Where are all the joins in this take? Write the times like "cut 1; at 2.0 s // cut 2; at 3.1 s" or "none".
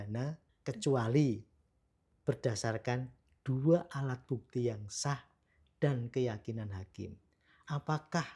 none